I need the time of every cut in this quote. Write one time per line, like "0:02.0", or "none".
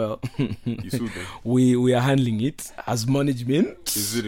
none